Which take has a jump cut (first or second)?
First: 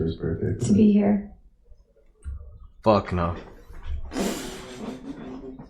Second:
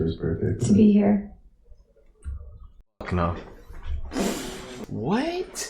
second